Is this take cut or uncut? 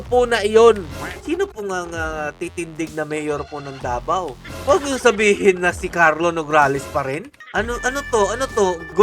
cut